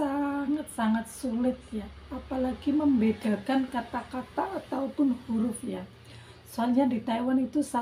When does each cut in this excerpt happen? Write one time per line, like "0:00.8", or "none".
none

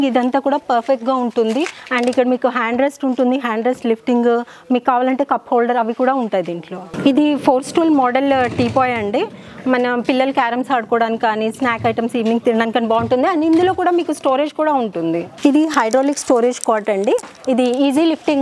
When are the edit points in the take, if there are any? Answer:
0:15.3

